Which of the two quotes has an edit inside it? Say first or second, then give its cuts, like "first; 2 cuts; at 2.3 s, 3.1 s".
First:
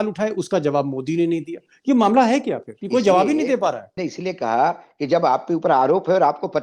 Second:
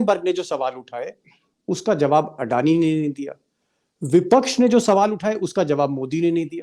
first; 2 cuts; at 2.7 s, 3.9 s